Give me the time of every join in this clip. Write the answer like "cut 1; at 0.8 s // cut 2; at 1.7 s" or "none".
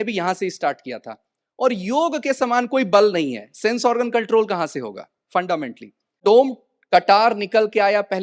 cut 1; at 6.2 s